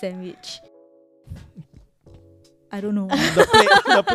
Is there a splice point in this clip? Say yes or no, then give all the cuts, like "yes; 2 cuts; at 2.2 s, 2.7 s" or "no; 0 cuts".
no; 0 cuts